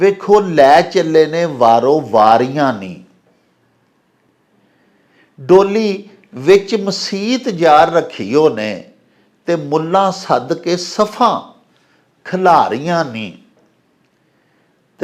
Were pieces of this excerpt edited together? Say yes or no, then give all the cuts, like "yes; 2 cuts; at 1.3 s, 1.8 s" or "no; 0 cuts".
no; 0 cuts